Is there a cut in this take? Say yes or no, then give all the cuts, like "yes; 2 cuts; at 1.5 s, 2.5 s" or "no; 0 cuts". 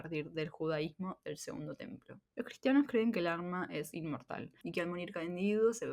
yes; 2 cuts; at 2.1 s, 4.6 s